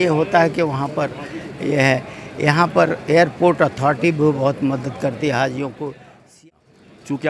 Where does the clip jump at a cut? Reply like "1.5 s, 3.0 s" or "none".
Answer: 6.4 s